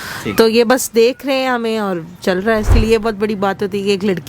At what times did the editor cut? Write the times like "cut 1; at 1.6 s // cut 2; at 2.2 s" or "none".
cut 1; at 2.7 s